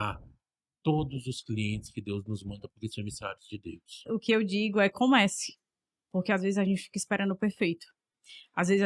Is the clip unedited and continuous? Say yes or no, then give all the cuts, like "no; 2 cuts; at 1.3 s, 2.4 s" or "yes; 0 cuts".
no; 1 cut; at 4.0 s